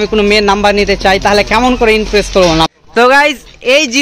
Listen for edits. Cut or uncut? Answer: cut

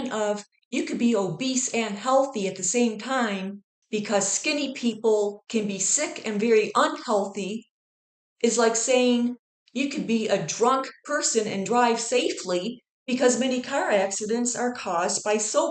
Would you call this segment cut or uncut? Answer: uncut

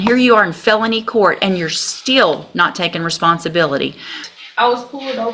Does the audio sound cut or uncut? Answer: cut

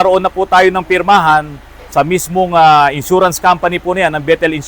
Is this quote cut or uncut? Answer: uncut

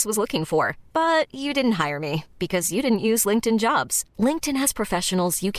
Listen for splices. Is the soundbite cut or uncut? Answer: uncut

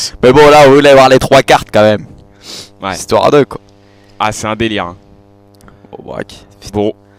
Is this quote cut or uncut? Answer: uncut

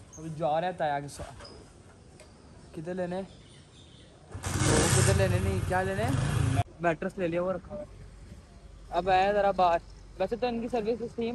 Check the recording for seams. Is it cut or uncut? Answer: cut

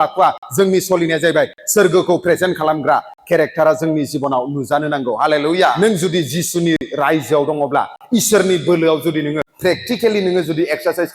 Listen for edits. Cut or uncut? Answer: cut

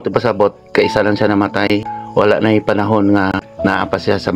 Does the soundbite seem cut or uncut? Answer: cut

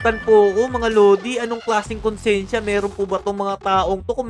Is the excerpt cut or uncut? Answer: uncut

